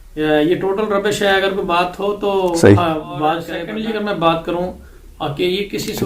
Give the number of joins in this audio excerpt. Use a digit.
1